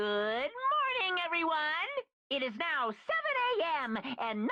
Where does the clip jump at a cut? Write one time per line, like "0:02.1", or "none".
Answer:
none